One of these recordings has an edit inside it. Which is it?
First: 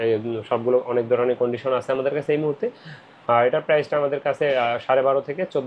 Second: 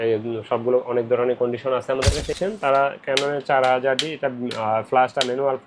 second; 1 cut; at 2.3 s

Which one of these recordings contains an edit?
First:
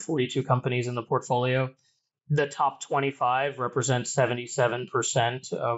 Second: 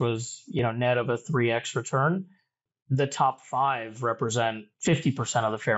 second; 1 cut; at 4.7 s

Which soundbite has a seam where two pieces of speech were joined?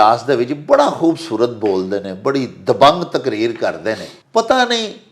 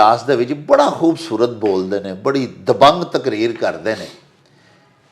first; 1 cut; at 4.1 s

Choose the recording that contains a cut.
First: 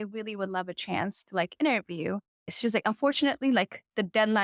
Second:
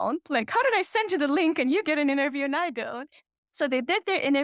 first; 1 cut; at 2.5 s

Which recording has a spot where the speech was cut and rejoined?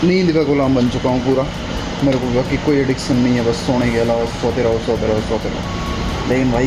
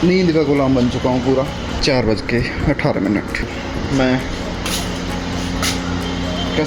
second; 2 cuts; at 1.8 s, 3.5 s

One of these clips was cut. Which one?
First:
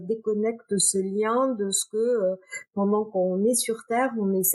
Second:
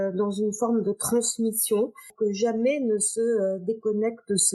second; 1 cut; at 2.0 s

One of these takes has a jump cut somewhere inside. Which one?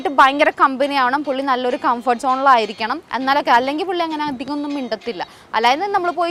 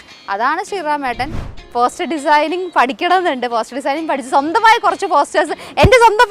second; 1 cut; at 1.6 s

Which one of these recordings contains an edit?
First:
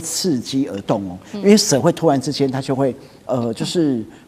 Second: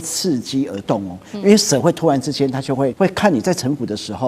second; 1 cut; at 2.9 s

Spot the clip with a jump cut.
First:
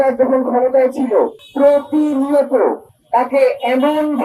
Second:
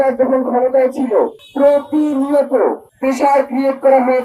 second; 1 cut; at 2.9 s

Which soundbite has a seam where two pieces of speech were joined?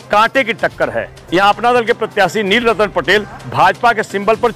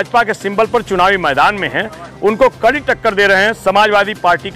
first; 1 cut; at 1.1 s

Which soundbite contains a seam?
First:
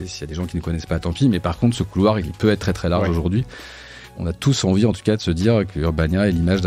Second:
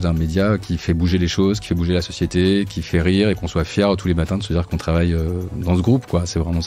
first; 3 cuts; at 2.3 s, 4.0 s, 5.7 s

